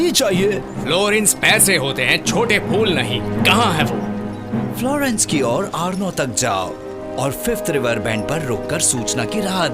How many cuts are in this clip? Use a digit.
0